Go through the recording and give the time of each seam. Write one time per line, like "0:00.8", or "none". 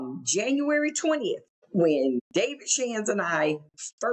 0:01.5
0:02.2